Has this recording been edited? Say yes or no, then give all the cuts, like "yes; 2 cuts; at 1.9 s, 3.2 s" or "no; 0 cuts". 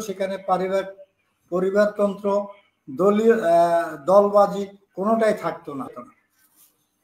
yes; 1 cut; at 5.9 s